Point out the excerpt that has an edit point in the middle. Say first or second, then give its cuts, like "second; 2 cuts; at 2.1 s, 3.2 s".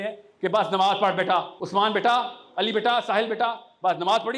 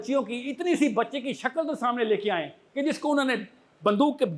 first; 1 cut; at 1.6 s